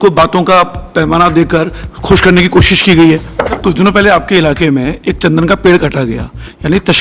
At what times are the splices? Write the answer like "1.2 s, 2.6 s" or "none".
3.5 s